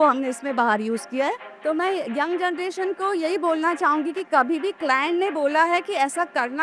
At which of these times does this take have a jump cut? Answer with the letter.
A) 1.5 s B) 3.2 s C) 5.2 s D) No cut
A